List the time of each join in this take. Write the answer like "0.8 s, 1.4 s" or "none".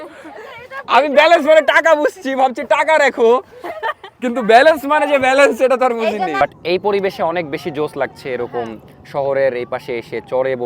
6.4 s